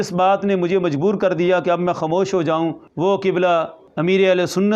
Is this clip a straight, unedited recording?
no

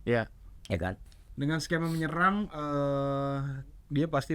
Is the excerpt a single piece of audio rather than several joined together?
no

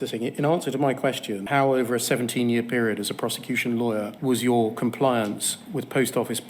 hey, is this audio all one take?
no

